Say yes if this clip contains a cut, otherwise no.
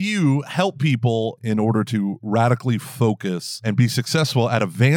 yes